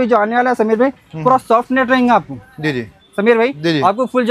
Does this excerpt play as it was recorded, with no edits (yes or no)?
no